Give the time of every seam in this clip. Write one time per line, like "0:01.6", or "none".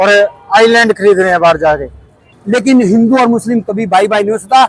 0:02.3